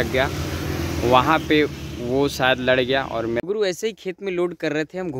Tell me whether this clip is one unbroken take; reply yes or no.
no